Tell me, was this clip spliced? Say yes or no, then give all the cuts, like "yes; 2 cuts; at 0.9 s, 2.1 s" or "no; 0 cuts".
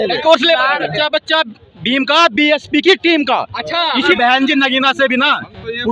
yes; 2 cuts; at 0.9 s, 4.1 s